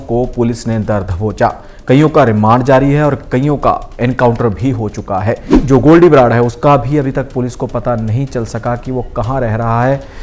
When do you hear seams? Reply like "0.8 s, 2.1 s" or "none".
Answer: 5.5 s

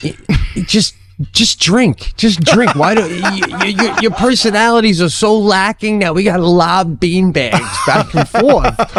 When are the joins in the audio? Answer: none

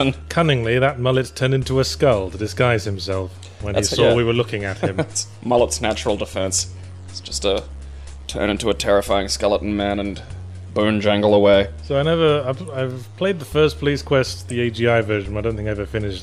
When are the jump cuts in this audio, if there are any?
9.0 s

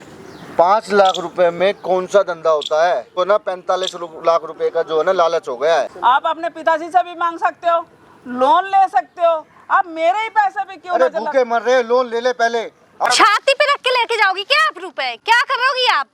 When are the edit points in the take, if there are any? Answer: 3.1 s, 5.9 s, 13.1 s

